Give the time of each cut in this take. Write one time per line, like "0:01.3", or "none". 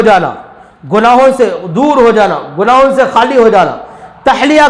none